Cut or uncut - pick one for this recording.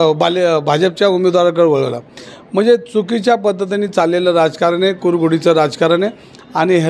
uncut